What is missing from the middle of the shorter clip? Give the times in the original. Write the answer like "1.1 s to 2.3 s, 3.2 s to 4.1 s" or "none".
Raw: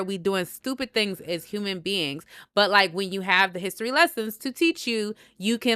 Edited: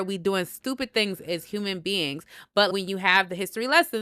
2.7 s to 2.9 s